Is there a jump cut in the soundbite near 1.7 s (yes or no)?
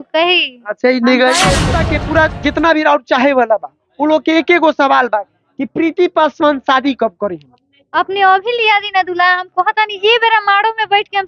yes